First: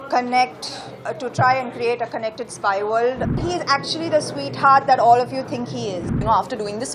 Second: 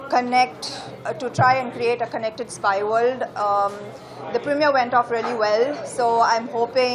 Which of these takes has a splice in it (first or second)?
first